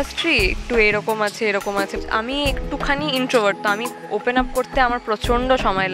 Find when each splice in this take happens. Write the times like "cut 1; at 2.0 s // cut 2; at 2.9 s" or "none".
cut 1; at 1.9 s

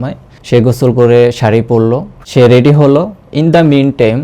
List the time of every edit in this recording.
cut 1; at 2.2 s

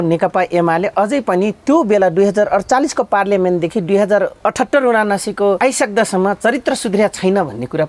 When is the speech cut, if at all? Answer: cut 1; at 4.3 s // cut 2; at 5.6 s

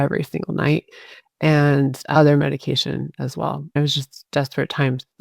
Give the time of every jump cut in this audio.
cut 1; at 3.8 s

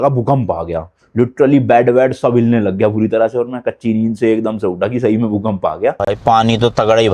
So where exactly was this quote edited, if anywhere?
cut 1; at 6.0 s

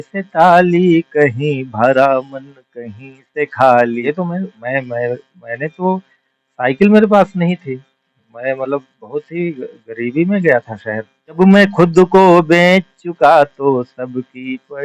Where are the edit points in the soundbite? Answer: cut 1; at 4.0 s // cut 2; at 11.4 s

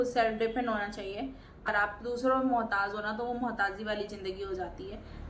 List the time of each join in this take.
cut 1; at 1.6 s

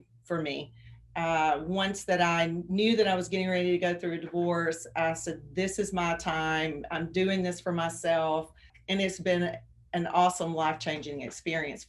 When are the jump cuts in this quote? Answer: cut 1; at 8.7 s

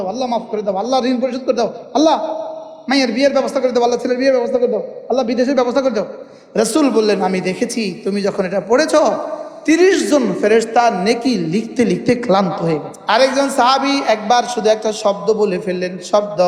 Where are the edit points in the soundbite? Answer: cut 1; at 6.2 s // cut 2; at 12.9 s

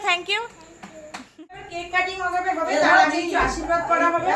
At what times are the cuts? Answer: cut 1; at 1.7 s

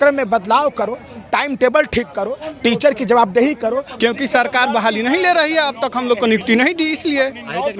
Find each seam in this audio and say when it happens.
cut 1; at 3.9 s

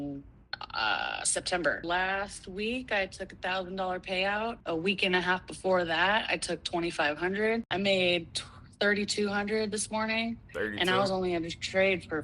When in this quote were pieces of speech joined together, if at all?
cut 1; at 1.8 s // cut 2; at 4.6 s // cut 3; at 7.7 s

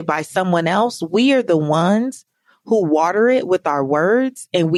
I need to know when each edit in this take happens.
none

